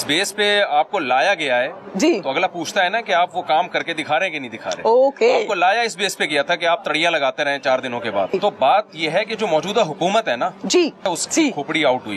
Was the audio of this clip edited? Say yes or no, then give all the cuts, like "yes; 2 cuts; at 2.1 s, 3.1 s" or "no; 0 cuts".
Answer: yes; 2 cuts; at 8.3 s, 11.1 s